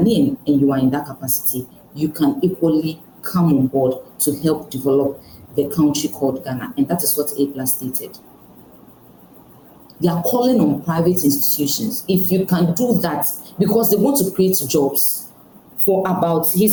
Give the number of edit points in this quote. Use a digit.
0